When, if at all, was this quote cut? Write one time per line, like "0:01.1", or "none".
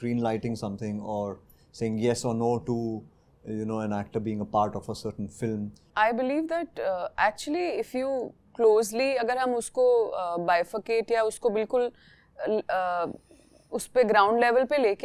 0:05.8